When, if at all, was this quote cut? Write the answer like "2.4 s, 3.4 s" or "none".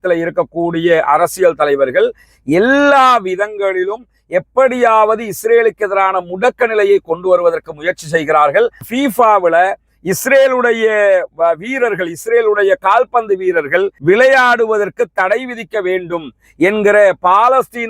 8.8 s